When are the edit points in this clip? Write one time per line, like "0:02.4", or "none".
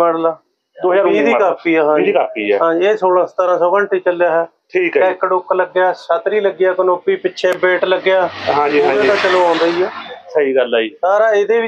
none

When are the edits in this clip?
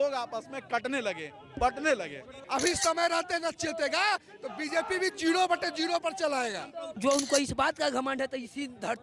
0:02.4
0:06.9

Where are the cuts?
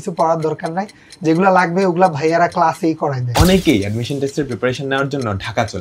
0:03.2

